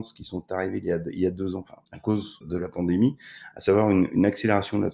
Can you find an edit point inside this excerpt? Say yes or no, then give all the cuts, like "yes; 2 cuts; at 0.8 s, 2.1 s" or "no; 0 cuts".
yes; 1 cut; at 2.2 s